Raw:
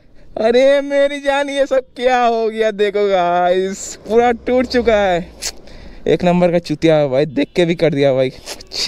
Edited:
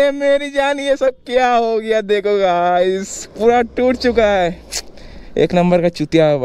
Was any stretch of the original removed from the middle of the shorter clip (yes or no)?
no